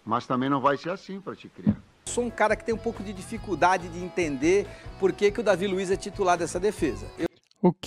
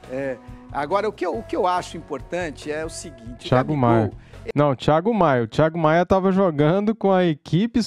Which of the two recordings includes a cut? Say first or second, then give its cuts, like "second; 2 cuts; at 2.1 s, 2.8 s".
first; 1 cut; at 2.1 s